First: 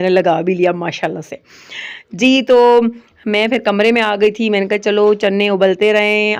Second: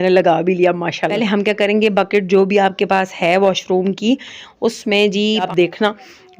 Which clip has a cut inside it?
second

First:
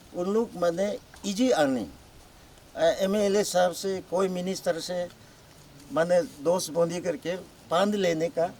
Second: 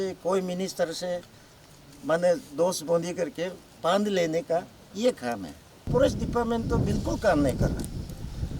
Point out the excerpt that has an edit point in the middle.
second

